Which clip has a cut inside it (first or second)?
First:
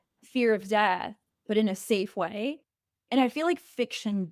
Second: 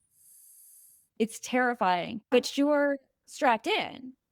second